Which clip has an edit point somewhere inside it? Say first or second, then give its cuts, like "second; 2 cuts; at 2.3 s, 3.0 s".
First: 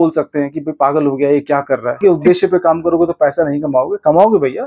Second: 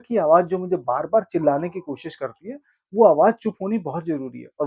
first; 1 cut; at 2.0 s